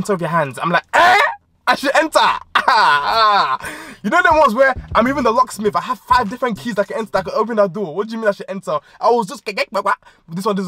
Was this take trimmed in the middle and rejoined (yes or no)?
no